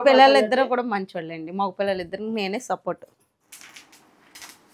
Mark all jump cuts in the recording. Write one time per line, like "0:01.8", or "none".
0:03.5